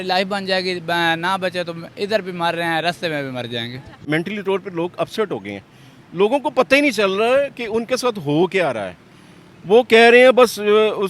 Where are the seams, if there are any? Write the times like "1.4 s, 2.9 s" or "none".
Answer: 4.0 s